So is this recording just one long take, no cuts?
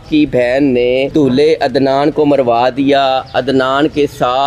no; 1 cut; at 1.1 s

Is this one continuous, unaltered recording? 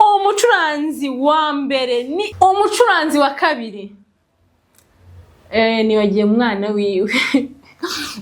no; 1 cut; at 2.3 s

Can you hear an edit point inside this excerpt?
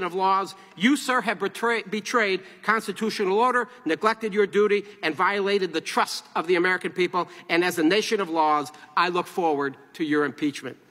no; 0 cuts

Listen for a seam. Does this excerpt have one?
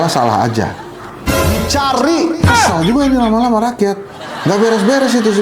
yes; 1 cut; at 2.6 s

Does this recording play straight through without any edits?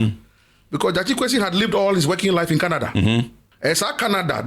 no; 1 cut; at 3.4 s

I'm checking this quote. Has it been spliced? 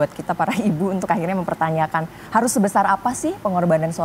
no; 0 cuts

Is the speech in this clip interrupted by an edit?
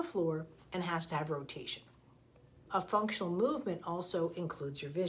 yes; 1 cut; at 2.6 s

